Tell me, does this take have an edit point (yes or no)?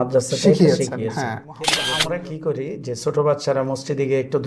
yes